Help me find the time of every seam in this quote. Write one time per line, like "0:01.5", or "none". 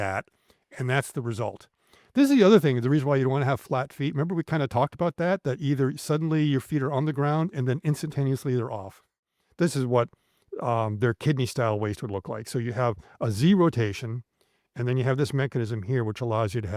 0:09.3